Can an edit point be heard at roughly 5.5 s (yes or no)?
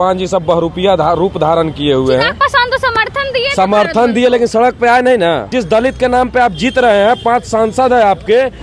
yes